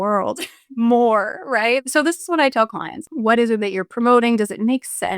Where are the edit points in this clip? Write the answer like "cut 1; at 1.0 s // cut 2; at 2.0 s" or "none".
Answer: cut 1; at 1.8 s // cut 2; at 3.0 s